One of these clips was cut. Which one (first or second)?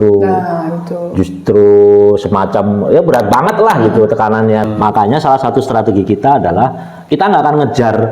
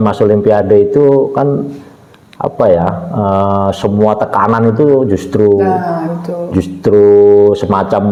first